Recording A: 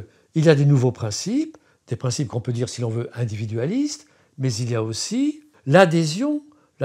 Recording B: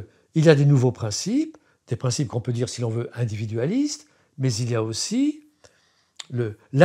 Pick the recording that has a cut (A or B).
A